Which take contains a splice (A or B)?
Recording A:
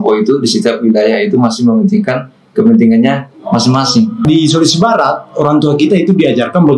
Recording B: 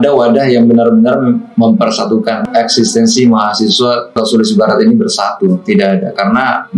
A